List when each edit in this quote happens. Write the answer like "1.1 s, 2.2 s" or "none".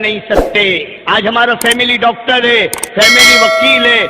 0.9 s